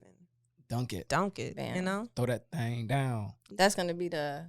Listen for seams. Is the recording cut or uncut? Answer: cut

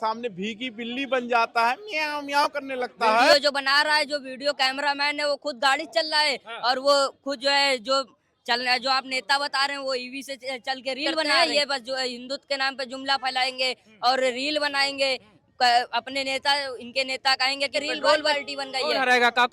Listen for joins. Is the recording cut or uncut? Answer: cut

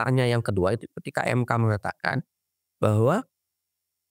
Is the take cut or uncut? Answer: uncut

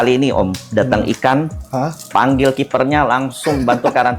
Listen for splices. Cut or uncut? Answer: uncut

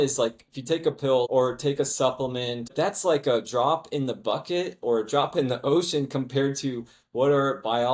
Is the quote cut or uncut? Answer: cut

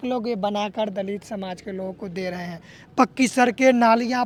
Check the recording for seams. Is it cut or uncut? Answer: uncut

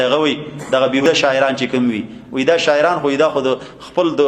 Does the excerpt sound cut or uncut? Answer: cut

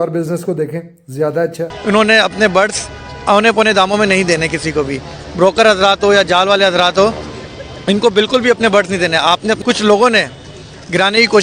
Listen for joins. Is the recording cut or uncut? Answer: cut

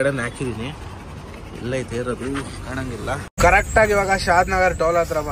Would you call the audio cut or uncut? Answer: cut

